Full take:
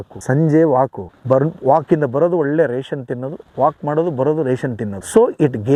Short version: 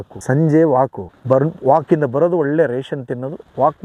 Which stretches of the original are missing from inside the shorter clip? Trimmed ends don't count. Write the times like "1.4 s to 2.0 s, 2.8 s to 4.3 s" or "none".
none